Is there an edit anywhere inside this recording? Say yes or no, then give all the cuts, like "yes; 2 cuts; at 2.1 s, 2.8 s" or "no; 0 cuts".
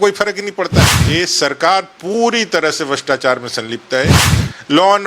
yes; 1 cut; at 1.0 s